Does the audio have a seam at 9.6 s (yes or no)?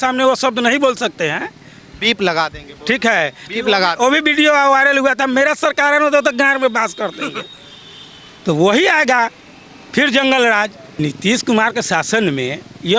no